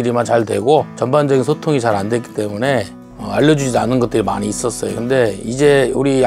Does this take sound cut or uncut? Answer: cut